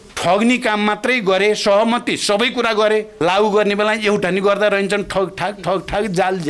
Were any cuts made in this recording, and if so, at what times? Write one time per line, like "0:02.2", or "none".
0:03.1